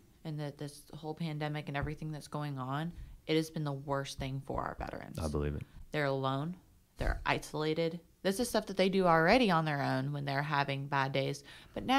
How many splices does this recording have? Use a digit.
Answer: 0